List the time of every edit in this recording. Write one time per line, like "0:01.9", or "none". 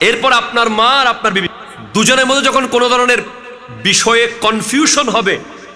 0:01.5